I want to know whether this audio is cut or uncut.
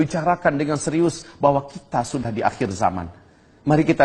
uncut